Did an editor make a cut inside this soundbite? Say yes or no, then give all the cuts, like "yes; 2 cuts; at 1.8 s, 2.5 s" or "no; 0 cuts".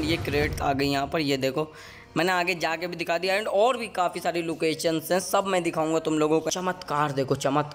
yes; 1 cut; at 6.5 s